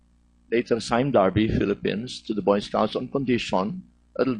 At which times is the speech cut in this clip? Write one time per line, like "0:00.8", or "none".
0:02.9